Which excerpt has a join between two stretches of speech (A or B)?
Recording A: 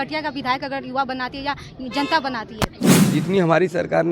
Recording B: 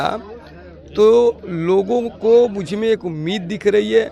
A